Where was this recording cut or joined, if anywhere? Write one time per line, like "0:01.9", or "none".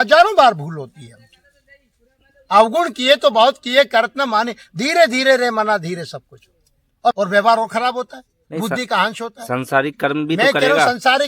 0:07.2